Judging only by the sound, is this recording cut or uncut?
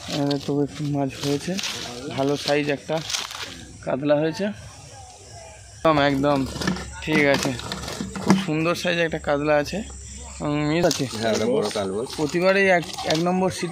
cut